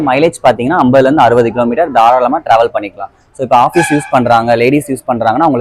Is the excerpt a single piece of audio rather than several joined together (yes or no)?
yes